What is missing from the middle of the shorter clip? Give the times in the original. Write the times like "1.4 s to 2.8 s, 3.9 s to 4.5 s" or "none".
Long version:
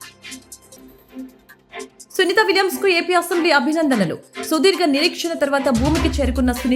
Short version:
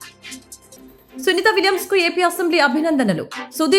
1.3 s to 2.2 s